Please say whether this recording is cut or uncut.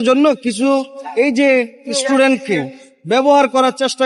uncut